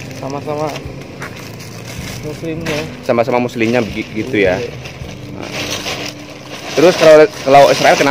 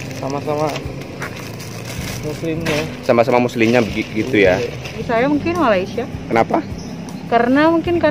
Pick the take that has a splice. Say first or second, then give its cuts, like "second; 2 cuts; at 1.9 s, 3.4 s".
second; 1 cut; at 5.0 s